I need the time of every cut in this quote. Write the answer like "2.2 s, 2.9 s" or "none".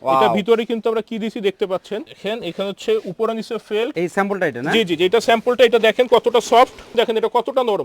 2.1 s, 3.9 s, 6.9 s